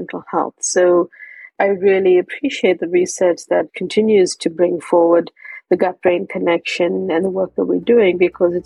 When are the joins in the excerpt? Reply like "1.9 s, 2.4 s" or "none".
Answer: 1.5 s, 3.8 s